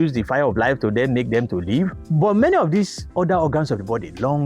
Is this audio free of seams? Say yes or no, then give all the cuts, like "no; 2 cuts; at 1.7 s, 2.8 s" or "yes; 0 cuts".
no; 1 cut; at 2.0 s